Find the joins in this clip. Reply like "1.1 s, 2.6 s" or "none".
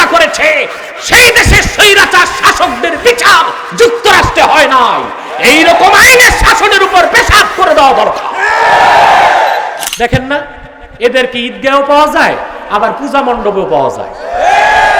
9.8 s